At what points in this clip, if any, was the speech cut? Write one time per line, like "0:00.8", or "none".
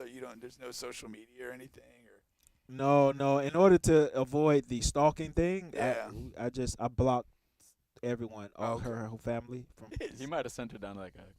0:09.9